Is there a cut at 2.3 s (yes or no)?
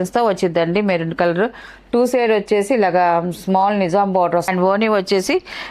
no